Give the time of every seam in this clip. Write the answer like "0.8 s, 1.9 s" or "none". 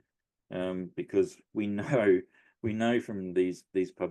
none